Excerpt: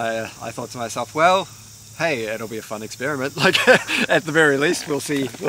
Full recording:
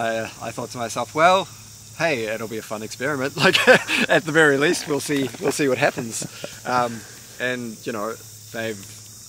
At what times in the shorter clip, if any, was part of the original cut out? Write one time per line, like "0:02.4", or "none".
none